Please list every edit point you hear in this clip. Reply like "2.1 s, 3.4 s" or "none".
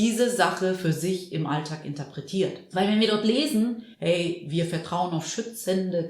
2.6 s, 3.9 s